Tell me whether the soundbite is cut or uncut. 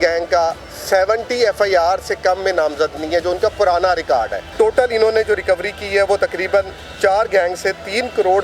cut